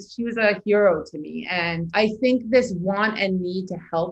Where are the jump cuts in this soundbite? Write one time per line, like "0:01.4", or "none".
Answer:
0:01.8